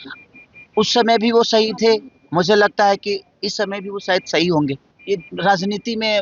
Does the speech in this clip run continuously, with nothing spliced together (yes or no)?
no